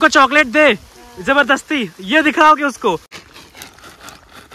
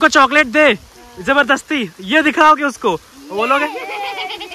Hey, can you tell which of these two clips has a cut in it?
first; 1 cut; at 3.2 s

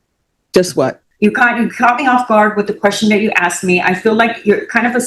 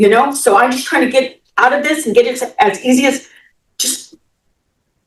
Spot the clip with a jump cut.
first; 1 cut; at 1.0 s

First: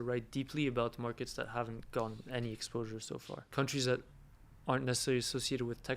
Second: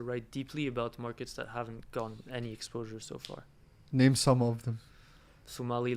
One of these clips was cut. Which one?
first; 1 cut; at 3.4 s

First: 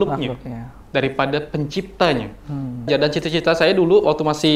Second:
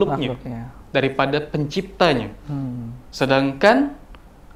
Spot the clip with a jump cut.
first; 1 cut; at 2.9 s

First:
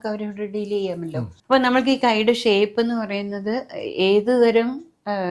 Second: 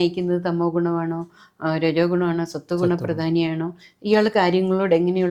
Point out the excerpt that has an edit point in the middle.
first; 1 cut; at 1.3 s

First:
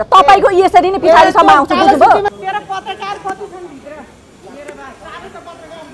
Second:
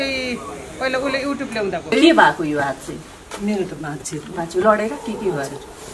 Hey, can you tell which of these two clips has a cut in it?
first; 1 cut; at 2.3 s

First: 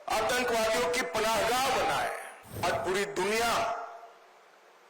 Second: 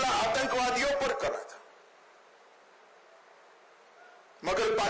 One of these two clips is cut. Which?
first; 1 cut; at 2.6 s

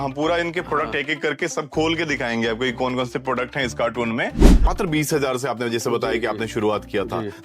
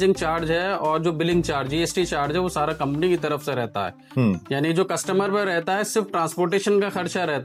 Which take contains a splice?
first; 1 cut; at 4.6 s

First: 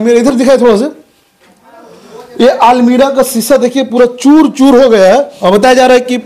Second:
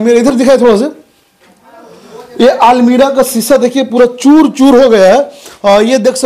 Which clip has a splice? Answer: first; 1 cut; at 5.3 s

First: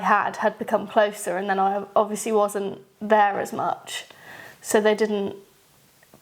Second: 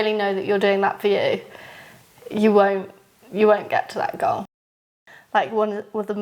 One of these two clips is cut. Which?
second; 1 cut; at 4.6 s

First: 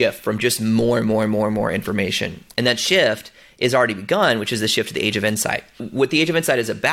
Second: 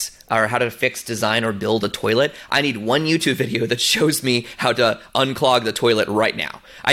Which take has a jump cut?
first; 1 cut; at 5.8 s

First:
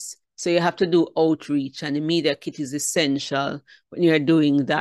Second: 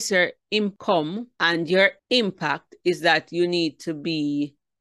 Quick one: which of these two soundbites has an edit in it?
second; 2 cuts; at 1.1 s, 2.0 s

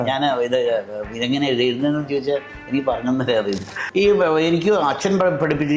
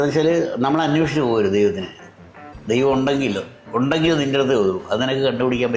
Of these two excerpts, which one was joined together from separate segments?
first; 1 cut; at 3.7 s

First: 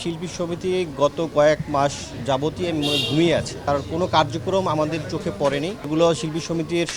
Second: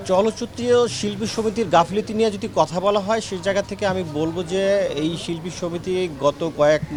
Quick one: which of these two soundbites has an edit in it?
first; 2 cuts; at 3.6 s, 5.9 s

